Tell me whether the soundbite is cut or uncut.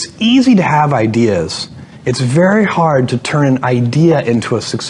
uncut